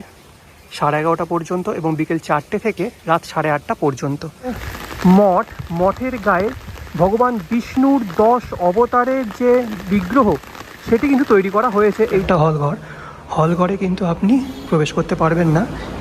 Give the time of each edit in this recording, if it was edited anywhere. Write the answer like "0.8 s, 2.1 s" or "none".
4.6 s, 12.2 s